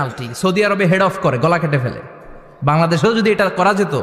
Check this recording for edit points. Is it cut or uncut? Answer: uncut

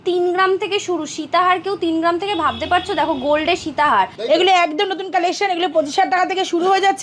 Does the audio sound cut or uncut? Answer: cut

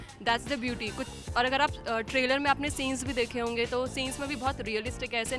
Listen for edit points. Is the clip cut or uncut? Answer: uncut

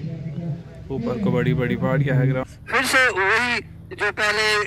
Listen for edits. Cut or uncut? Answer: cut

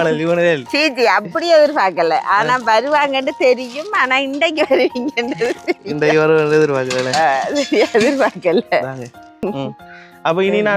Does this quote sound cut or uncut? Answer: cut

